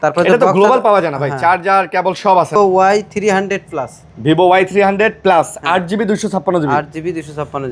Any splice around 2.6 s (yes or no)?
yes